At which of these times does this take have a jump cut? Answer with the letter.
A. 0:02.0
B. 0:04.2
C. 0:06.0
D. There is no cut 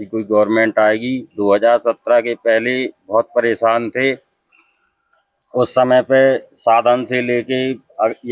D